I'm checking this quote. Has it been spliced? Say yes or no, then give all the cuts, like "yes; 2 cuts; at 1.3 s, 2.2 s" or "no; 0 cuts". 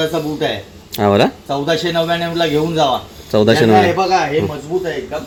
no; 0 cuts